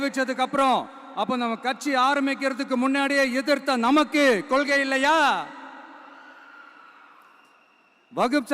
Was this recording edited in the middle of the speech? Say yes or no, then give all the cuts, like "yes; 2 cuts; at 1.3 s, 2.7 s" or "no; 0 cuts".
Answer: no; 0 cuts